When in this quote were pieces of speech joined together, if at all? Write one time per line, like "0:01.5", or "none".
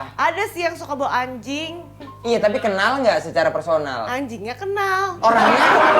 0:02.1